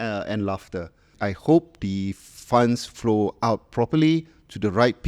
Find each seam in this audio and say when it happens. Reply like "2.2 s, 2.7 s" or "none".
1.1 s